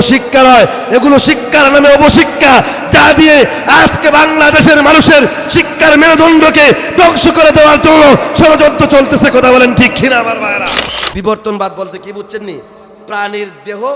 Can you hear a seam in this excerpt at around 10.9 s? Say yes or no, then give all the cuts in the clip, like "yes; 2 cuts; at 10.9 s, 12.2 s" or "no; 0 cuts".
yes; 1 cut; at 10.9 s